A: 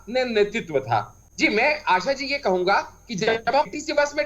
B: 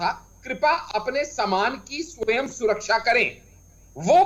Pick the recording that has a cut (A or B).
A